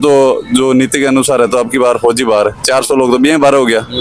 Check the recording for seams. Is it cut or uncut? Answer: uncut